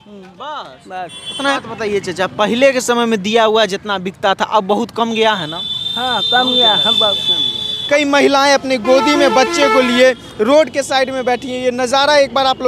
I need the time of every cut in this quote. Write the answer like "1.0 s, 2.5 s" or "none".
1.5 s, 7.7 s